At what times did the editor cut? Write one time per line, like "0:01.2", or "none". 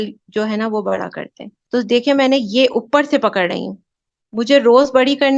0:01.5